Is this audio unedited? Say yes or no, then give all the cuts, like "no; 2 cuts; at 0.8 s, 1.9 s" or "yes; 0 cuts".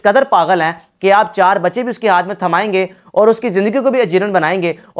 yes; 0 cuts